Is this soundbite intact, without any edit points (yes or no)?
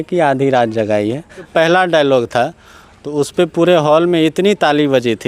no